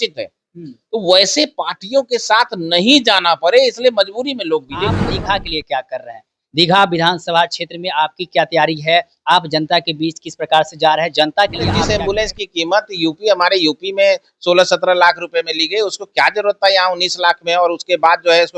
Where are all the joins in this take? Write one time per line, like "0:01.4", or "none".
0:05.1
0:11.8